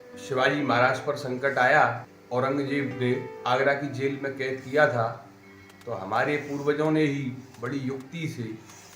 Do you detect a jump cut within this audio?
yes; 2 cuts; at 2.1 s, 3.1 s

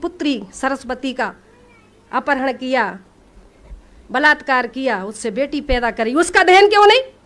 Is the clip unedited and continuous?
yes; 0 cuts

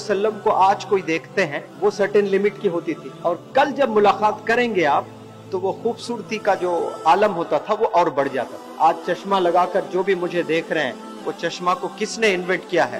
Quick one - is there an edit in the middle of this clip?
yes; 3 cuts; at 1.6 s, 3.0 s, 8.6 s

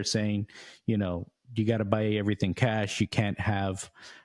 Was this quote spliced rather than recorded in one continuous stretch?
no; 0 cuts

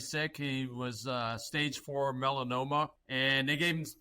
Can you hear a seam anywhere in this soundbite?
yes; 1 cut; at 3.0 s

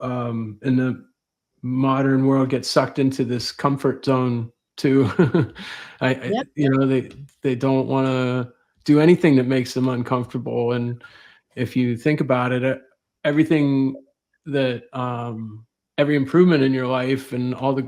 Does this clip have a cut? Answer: no; 0 cuts

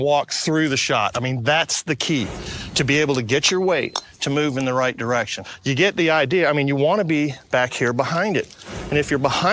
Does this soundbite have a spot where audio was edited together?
no; 0 cuts

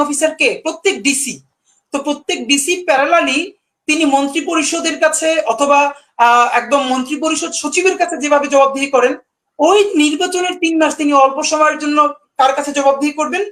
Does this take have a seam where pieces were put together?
no; 0 cuts

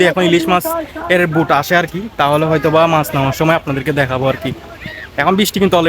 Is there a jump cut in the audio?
no; 0 cuts

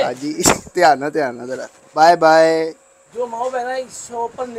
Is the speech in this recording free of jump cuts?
no; 2 cuts; at 1.9 s, 3.0 s

